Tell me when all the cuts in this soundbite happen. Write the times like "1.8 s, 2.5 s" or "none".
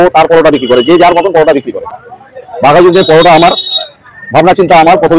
none